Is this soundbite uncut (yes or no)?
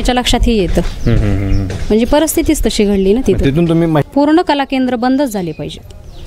no